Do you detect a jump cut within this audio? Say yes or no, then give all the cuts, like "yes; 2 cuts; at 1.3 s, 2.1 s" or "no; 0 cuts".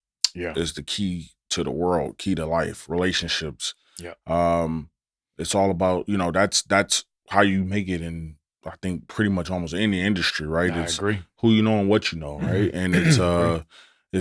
no; 0 cuts